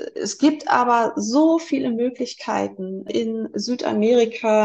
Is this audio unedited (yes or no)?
no